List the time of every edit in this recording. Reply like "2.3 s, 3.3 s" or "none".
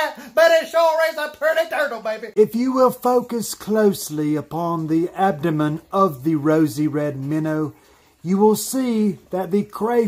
2.2 s